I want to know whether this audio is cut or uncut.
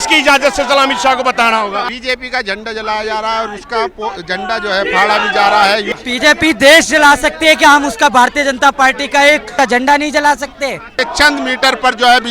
cut